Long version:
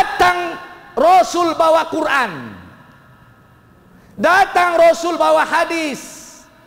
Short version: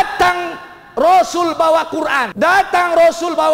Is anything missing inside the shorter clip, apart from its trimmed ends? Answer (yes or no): yes